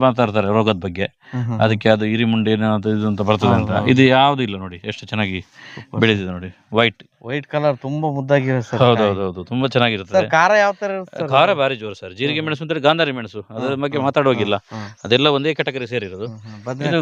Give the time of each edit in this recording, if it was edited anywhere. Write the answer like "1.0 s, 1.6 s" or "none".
none